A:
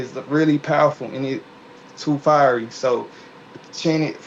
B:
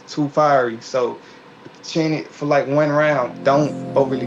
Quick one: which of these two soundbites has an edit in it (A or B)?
B